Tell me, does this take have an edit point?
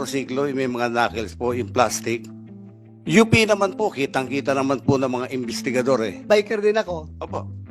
yes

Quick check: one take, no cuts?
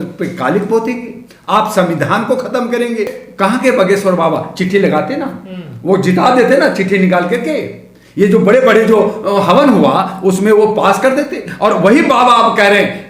no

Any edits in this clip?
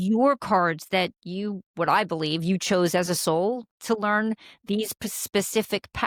no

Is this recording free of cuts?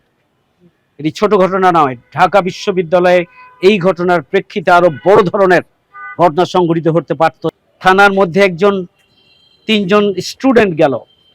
no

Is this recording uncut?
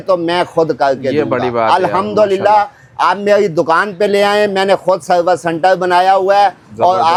yes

